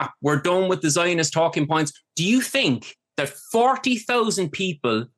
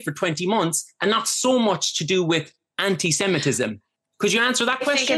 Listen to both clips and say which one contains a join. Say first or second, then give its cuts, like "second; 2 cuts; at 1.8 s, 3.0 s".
first; 1 cut; at 2.0 s